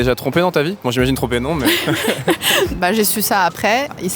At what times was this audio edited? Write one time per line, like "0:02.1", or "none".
0:02.7